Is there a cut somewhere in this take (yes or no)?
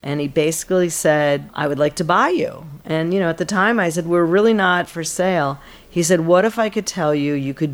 yes